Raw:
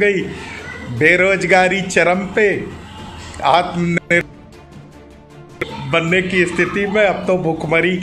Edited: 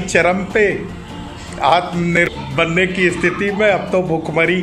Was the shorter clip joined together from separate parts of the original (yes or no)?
yes